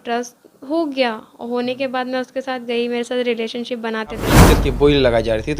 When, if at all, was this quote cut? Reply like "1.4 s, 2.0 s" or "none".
4.5 s